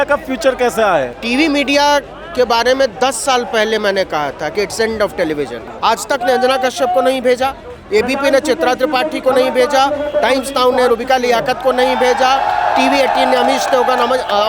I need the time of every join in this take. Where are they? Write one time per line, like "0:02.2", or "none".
0:01.2
0:05.6